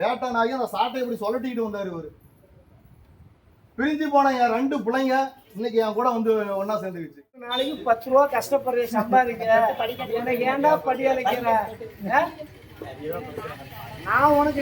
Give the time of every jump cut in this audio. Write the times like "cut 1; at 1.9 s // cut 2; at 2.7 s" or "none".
cut 1; at 7.6 s

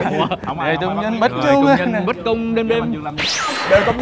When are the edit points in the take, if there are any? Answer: none

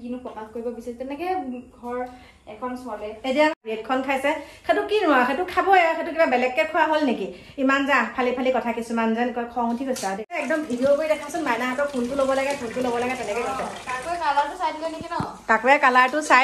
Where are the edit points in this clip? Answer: cut 1; at 3.6 s // cut 2; at 10.4 s

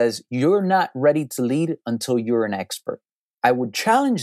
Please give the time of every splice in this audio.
cut 1; at 3.2 s

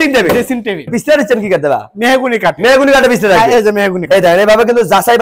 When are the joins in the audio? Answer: cut 1; at 0.9 s

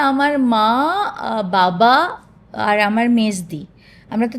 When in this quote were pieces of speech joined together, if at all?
none

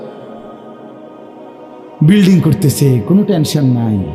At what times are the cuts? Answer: none

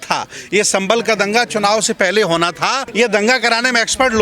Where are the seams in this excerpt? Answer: cut 1; at 2.8 s

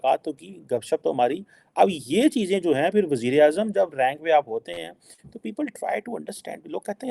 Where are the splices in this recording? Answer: none

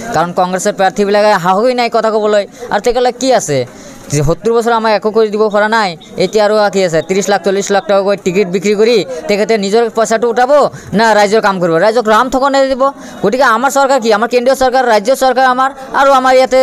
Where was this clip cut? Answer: none

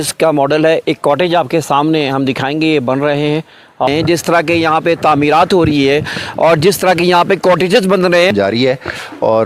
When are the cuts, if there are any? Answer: cut 1; at 3.9 s // cut 2; at 8.3 s

